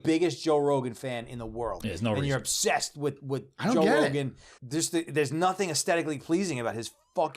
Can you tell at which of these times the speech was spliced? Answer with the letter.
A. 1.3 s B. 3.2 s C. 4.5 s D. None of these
C